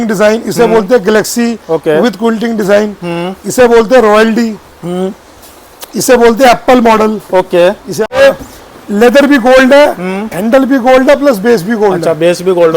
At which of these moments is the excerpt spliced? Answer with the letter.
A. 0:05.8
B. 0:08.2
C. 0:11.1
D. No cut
B